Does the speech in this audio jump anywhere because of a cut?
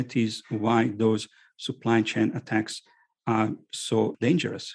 no; 0 cuts

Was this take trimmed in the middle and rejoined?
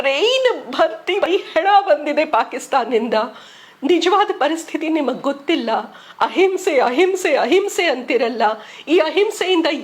yes; 1 cut; at 1.2 s

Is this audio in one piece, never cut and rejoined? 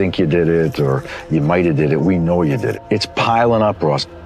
no; 1 cut; at 2.8 s

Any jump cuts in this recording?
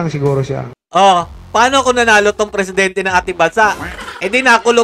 no; 0 cuts

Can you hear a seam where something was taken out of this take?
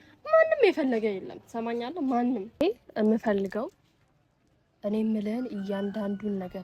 yes; 1 cut; at 2.6 s

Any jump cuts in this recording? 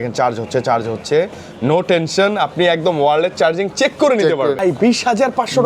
yes; 1 cut; at 4.6 s

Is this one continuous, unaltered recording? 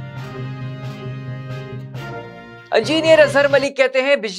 no; 1 cut; at 1.9 s

